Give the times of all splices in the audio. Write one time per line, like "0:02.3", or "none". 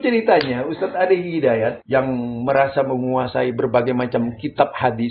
0:01.8